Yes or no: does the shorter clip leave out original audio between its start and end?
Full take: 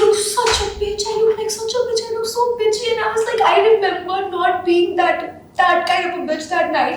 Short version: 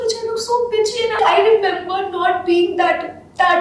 yes